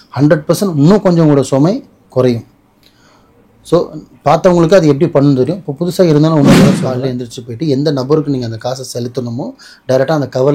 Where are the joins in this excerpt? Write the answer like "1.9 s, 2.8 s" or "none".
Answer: 6.9 s